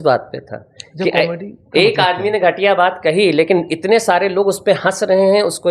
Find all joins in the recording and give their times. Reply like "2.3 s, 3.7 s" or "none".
none